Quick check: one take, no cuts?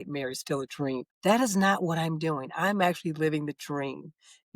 no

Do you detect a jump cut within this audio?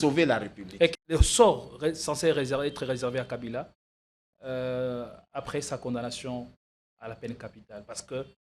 yes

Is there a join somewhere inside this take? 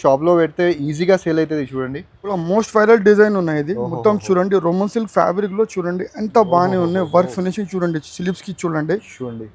yes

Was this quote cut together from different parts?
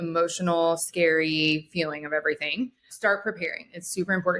yes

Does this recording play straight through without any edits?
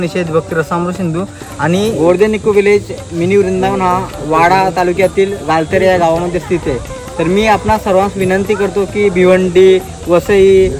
no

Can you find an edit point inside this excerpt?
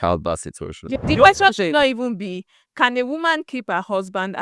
yes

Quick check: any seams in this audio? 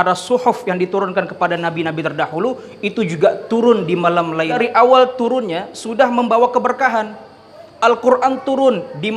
yes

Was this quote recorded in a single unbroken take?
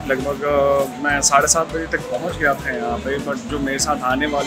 yes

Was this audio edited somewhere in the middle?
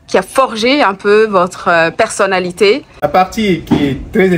yes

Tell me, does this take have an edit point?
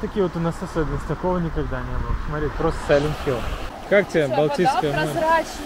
no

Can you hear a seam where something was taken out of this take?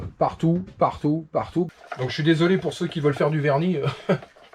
yes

